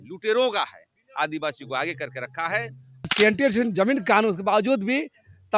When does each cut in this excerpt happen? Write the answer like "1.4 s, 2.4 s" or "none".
3.1 s